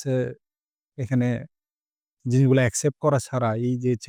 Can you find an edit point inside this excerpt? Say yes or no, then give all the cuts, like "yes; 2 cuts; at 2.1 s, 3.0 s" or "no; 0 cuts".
no; 0 cuts